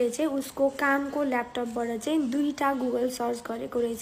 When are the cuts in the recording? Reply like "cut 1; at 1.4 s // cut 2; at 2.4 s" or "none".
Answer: none